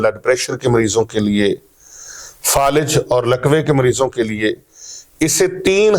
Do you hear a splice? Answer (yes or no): no